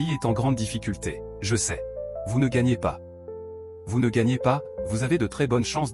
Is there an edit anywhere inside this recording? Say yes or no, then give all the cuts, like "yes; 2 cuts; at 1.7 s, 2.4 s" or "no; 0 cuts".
no; 0 cuts